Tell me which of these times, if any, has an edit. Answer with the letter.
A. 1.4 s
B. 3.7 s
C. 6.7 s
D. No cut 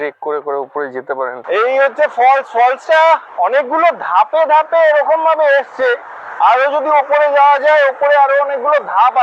A